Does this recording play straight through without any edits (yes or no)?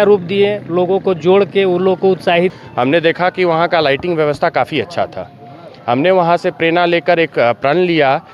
no